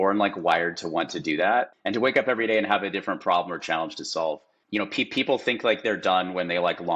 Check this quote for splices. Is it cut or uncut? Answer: uncut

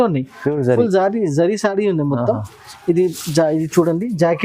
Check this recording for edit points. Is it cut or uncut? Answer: uncut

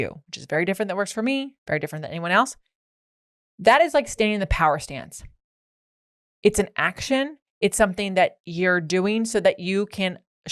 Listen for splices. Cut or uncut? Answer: uncut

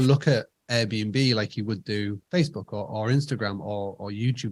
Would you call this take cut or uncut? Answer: uncut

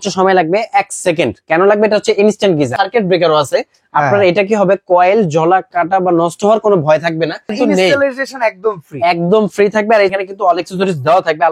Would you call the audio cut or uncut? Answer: cut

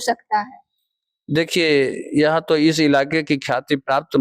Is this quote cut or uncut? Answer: uncut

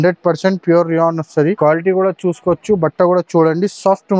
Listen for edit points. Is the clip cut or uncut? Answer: cut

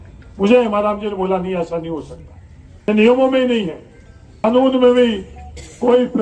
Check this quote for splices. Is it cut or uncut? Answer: cut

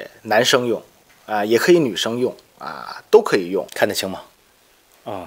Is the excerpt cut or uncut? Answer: cut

